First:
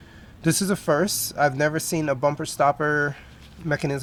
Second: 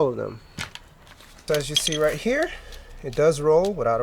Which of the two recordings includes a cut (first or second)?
second